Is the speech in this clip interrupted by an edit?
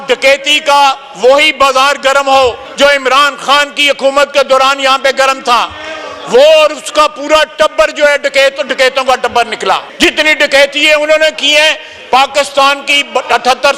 yes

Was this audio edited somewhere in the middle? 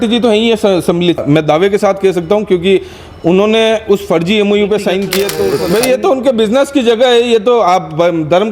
yes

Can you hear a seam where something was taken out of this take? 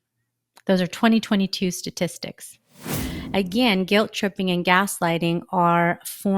yes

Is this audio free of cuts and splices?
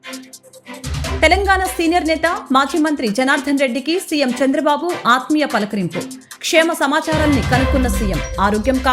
no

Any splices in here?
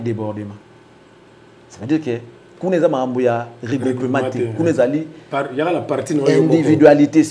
no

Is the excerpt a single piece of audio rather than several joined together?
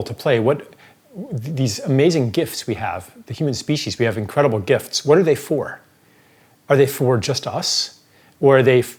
yes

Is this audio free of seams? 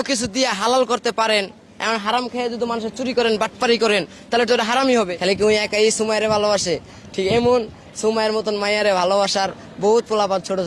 no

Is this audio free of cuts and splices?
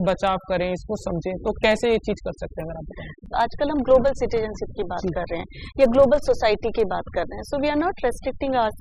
no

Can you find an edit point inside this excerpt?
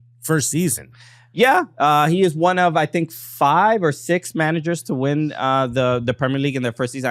no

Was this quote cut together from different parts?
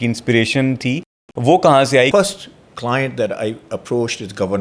yes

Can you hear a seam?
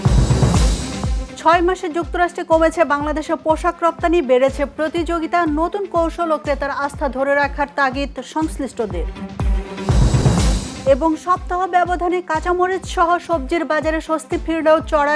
yes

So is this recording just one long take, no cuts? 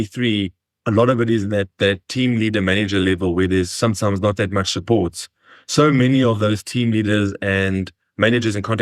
yes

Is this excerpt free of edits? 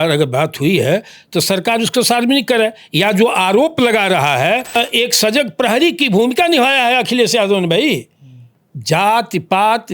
no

